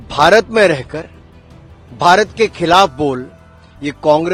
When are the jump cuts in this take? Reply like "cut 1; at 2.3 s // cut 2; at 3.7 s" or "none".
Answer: none